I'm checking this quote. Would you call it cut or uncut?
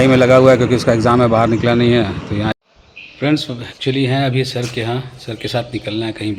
cut